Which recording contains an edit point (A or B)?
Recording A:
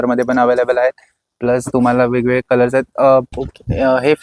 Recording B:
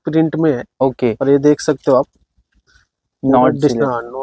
A